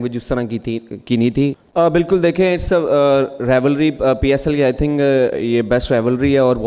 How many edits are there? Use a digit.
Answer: 1